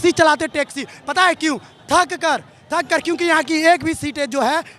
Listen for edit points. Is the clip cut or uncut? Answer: uncut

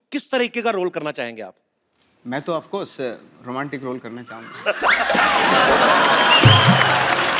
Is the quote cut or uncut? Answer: uncut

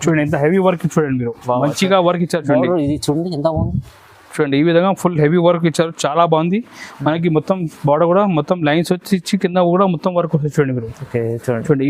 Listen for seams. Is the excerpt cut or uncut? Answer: uncut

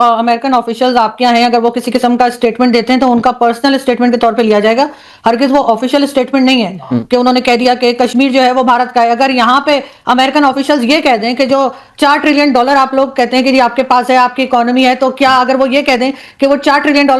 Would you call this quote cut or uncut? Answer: uncut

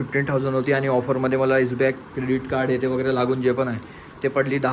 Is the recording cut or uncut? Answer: uncut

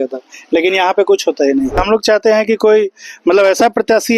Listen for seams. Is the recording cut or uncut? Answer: cut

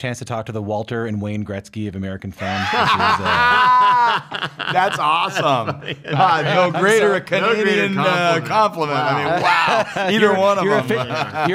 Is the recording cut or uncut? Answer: uncut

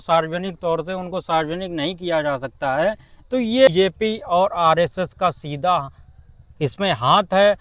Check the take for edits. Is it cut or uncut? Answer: cut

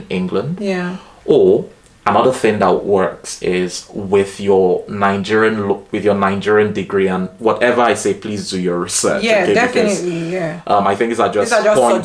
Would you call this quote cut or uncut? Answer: uncut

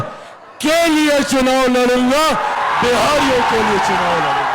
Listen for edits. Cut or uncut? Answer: uncut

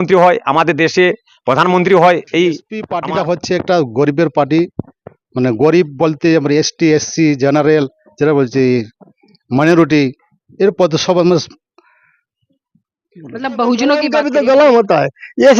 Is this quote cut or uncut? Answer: cut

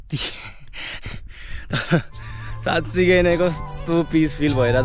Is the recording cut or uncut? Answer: uncut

